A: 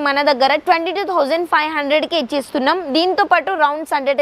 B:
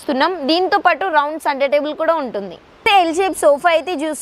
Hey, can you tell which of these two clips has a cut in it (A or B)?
B